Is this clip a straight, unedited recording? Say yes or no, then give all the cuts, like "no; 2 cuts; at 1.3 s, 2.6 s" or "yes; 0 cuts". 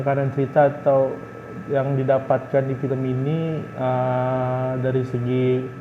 yes; 0 cuts